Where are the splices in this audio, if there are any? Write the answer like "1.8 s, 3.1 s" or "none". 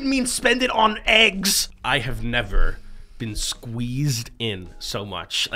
1.7 s